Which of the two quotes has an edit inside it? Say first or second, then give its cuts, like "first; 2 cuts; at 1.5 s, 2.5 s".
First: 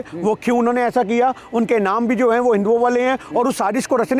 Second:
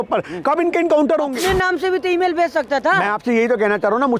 second; 1 cut; at 1.3 s